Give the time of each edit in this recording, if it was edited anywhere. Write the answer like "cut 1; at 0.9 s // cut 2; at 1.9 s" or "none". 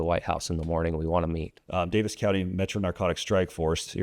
cut 1; at 1.5 s